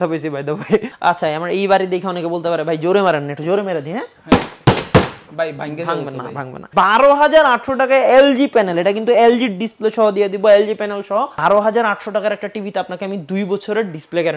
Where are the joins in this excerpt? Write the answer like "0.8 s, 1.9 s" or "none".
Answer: 0.9 s, 6.7 s, 11.3 s